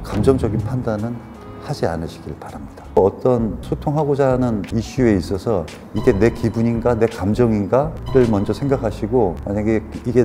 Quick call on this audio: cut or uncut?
uncut